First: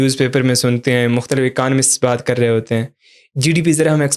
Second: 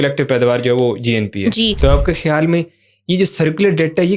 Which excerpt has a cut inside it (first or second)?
second